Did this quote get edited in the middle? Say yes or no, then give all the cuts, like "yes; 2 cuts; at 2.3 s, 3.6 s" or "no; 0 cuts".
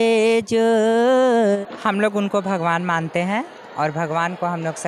yes; 1 cut; at 1.6 s